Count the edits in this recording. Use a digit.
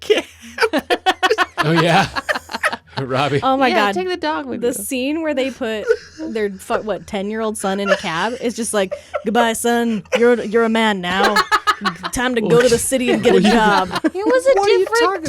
1